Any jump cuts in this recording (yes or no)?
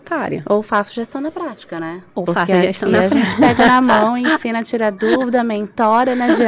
no